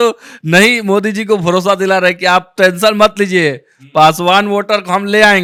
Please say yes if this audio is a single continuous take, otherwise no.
yes